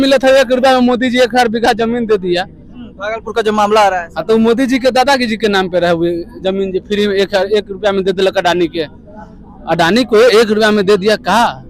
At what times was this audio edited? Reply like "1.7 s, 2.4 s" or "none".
none

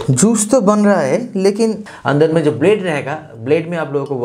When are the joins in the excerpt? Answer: 1.8 s

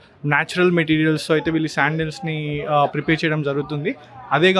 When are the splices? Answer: none

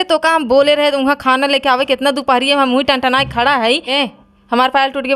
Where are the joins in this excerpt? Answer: 3.9 s

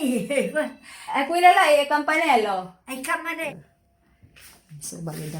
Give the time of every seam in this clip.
3.5 s

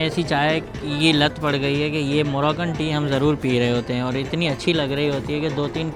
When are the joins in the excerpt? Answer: none

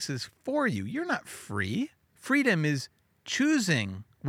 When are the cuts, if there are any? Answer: 2.1 s

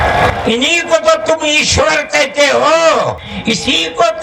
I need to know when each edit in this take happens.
3.3 s

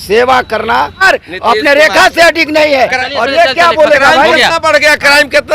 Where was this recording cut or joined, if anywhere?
1.0 s

